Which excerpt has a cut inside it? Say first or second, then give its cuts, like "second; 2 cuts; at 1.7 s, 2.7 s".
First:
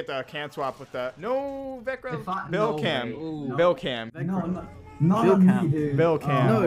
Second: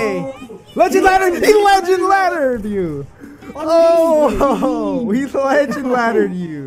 first; 1 cut; at 1.2 s